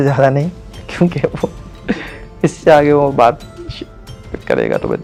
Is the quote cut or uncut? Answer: uncut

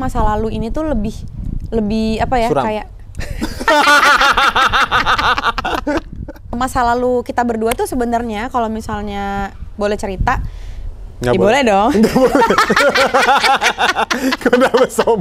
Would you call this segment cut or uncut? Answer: cut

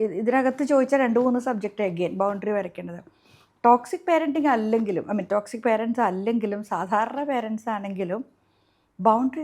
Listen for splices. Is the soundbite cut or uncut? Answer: uncut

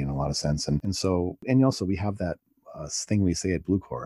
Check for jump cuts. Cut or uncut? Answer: uncut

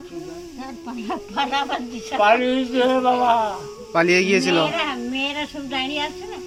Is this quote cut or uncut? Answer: uncut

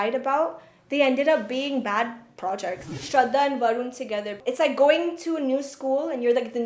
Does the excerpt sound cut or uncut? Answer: cut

